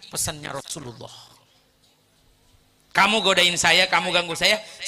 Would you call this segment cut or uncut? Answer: uncut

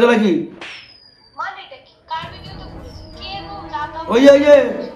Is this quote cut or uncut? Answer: uncut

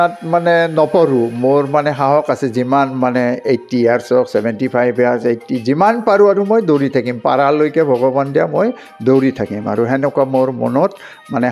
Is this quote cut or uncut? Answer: uncut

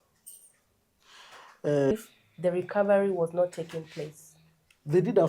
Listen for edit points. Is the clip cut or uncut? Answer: cut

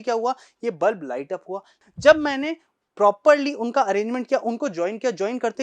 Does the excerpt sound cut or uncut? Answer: cut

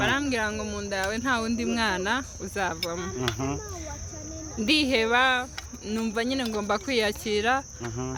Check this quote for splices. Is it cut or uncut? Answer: uncut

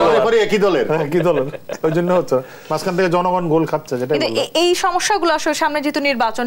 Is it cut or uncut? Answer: uncut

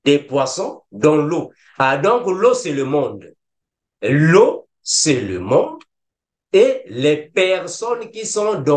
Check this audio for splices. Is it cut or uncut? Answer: uncut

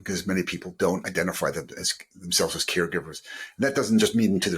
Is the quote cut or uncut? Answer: uncut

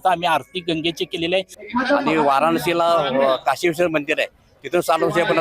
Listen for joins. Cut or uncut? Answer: cut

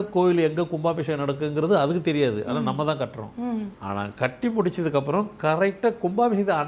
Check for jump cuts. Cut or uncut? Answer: cut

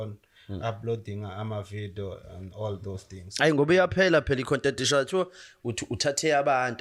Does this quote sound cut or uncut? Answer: uncut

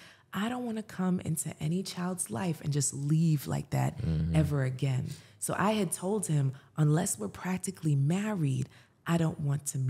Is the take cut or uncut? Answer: uncut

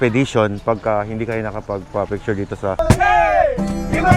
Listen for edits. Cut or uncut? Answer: cut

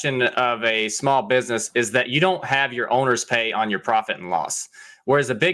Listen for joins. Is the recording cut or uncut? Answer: uncut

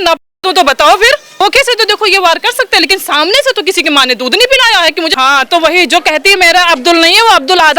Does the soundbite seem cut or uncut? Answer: cut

